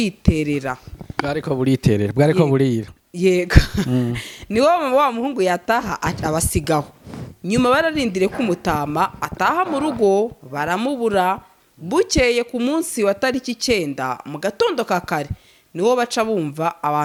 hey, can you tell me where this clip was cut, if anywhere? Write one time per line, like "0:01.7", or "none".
none